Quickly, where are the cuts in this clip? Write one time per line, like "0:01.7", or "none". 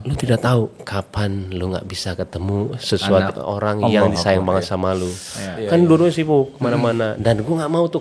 none